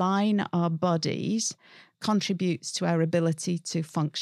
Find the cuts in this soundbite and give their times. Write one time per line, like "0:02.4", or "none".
none